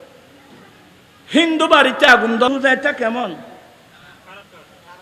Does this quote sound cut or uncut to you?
cut